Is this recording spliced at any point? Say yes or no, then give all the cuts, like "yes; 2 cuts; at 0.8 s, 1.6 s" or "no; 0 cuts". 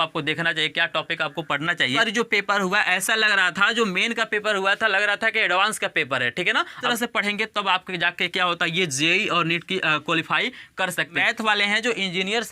yes; 3 cuts; at 2.0 s, 6.8 s, 11.2 s